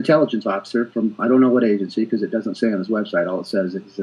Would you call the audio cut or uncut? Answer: uncut